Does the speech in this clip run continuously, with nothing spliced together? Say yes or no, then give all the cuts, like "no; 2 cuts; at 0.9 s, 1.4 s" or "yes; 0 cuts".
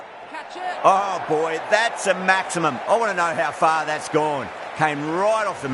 yes; 0 cuts